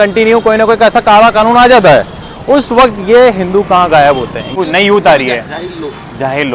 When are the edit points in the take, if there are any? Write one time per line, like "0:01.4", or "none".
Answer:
0:04.5